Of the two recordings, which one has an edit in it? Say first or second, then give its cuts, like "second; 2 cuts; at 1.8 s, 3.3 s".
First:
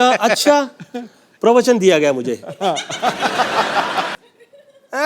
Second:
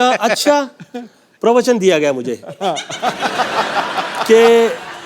first; 1 cut; at 4.1 s